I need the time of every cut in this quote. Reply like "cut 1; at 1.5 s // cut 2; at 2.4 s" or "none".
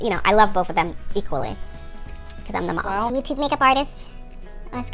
cut 1; at 3.1 s